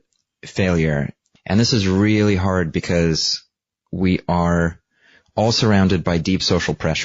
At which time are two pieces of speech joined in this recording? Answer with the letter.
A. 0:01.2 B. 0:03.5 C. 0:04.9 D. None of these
A